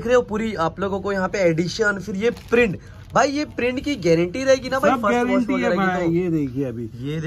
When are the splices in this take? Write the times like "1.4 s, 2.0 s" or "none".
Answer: none